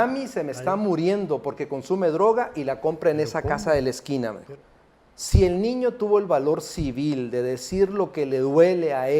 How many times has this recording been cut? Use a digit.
1